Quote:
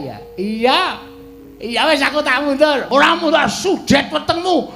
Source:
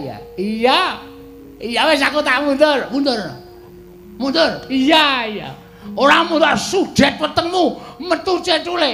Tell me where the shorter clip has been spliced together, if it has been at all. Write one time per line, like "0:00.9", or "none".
0:02.9